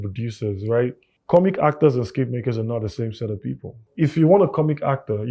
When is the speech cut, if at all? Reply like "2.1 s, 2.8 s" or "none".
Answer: 1.1 s, 3.8 s

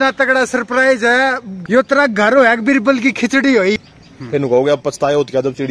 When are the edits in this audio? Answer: 1.6 s, 3.8 s

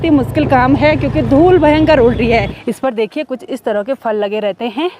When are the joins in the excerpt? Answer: 2.5 s

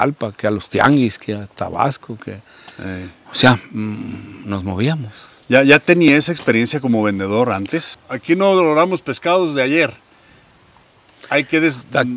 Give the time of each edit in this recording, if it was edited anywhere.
7.9 s

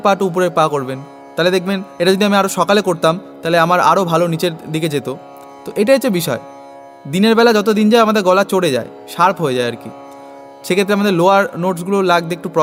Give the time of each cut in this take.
none

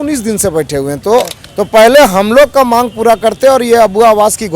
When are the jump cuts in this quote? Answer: 1.4 s

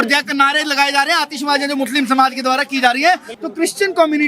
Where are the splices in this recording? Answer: 3.3 s

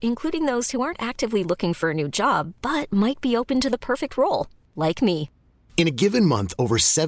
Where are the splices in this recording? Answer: none

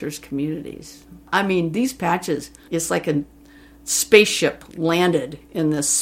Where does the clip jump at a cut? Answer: 1.3 s, 2.6 s

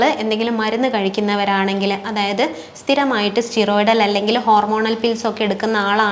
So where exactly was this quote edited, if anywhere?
none

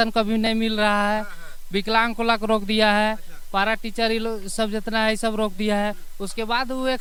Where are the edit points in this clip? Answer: none

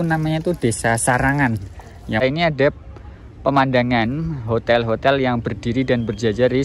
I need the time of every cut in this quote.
2.2 s

